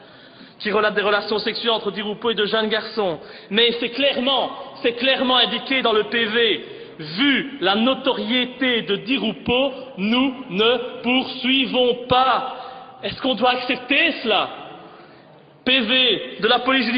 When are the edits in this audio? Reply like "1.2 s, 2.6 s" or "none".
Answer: 5.6 s